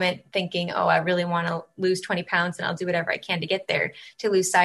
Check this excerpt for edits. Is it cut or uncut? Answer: uncut